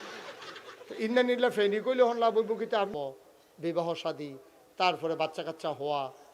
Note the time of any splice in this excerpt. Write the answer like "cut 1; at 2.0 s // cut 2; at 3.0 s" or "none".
cut 1; at 2.9 s